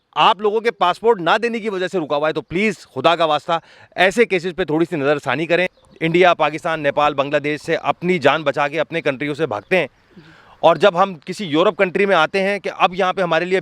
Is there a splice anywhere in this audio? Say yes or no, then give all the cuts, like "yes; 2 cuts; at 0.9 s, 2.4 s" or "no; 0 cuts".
yes; 1 cut; at 5.8 s